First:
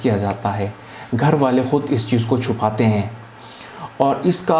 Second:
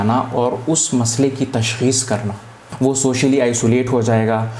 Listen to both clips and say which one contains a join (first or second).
second